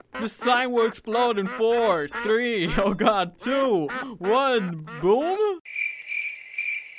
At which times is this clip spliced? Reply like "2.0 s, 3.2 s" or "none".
5.7 s